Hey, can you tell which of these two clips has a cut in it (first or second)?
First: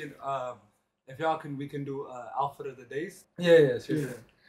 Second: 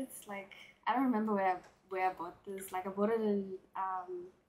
first